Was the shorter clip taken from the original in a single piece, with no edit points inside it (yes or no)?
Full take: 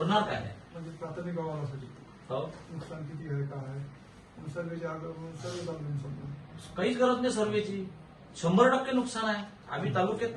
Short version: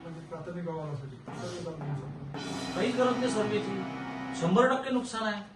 no